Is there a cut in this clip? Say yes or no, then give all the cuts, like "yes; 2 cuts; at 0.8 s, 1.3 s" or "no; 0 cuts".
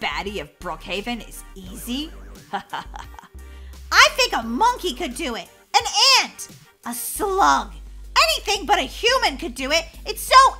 no; 0 cuts